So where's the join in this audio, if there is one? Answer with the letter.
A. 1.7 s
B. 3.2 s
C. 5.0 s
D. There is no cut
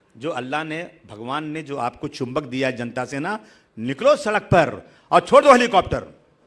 D